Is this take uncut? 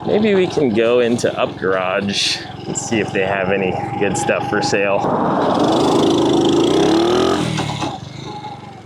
no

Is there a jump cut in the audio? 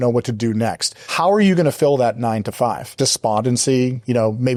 no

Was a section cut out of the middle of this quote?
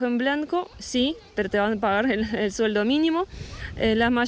no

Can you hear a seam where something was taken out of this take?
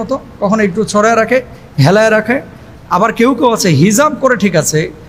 no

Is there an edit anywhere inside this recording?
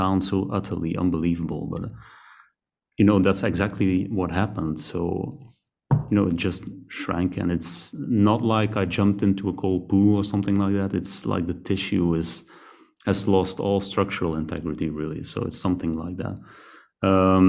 no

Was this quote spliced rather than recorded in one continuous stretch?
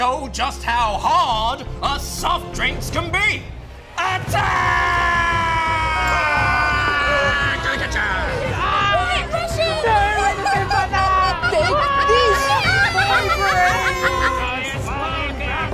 yes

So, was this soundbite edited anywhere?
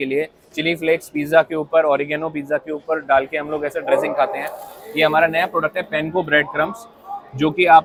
no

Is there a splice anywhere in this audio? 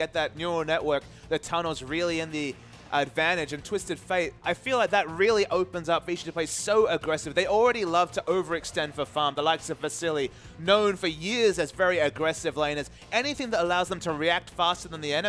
yes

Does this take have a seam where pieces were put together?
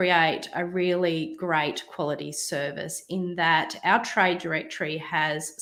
no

